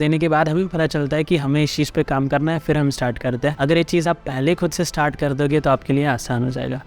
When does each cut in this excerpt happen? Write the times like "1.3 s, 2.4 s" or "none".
none